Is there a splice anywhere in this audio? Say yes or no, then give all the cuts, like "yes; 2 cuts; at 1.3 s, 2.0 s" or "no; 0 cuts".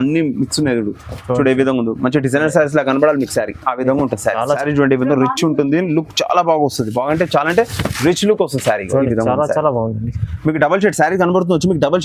yes; 1 cut; at 4.4 s